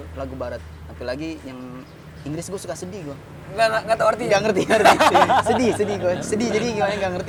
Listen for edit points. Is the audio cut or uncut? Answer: uncut